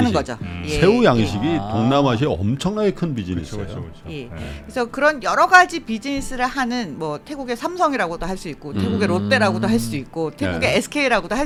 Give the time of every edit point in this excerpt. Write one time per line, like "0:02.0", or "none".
none